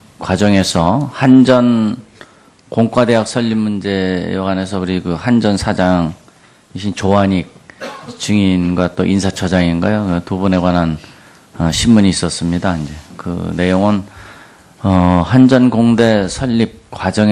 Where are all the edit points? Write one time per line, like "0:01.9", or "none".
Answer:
none